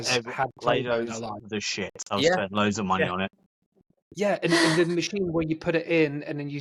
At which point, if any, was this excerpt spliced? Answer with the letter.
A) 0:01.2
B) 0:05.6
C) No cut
C